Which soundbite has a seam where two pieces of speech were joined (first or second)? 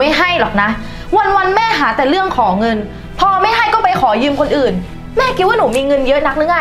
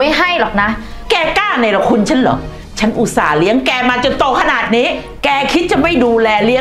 second